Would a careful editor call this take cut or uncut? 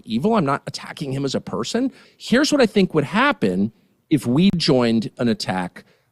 cut